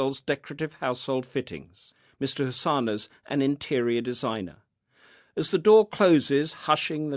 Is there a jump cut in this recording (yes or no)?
no